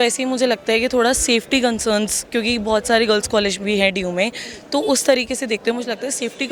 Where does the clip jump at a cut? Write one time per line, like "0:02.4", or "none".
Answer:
none